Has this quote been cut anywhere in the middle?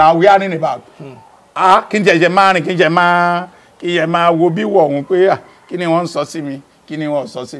no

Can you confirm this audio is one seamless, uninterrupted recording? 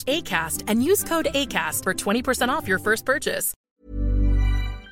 no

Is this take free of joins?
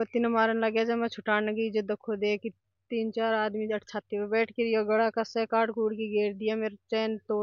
yes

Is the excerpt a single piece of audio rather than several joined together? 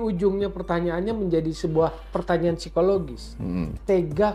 yes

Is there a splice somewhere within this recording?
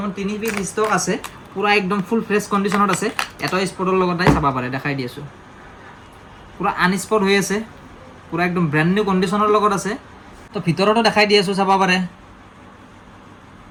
no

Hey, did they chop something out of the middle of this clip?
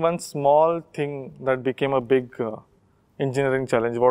no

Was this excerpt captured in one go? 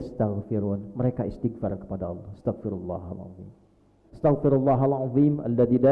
no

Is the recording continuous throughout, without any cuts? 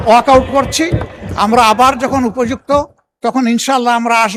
yes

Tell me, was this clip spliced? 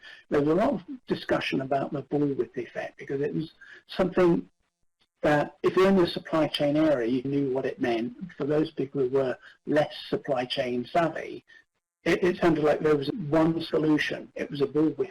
yes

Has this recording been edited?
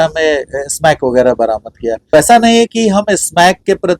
yes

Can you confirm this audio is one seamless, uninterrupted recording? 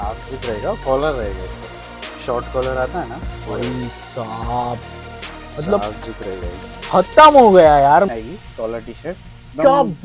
no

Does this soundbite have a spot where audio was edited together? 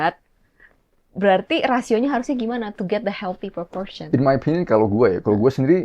no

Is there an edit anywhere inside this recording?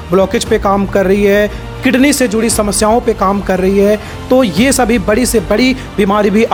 no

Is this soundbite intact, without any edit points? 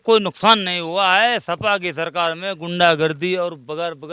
yes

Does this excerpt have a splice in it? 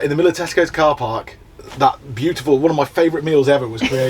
no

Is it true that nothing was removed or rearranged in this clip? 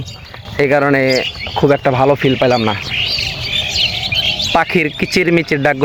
yes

